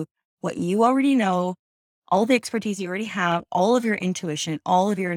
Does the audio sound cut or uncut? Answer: uncut